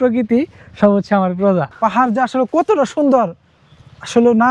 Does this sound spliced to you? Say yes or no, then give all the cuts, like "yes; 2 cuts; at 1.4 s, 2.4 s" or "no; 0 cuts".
yes; 1 cut; at 1.7 s